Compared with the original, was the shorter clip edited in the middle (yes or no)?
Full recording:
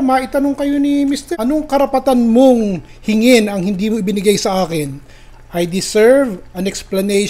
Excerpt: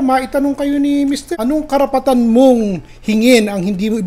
no